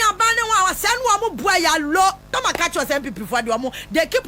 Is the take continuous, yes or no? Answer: no